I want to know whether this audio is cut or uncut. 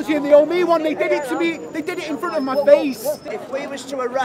cut